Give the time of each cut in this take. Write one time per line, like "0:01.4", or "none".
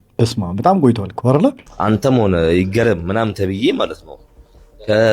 0:01.7